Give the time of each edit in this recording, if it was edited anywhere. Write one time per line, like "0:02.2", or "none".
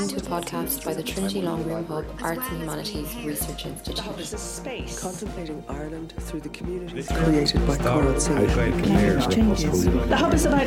none